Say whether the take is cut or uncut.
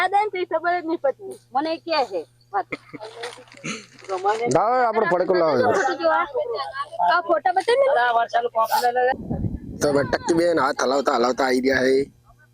cut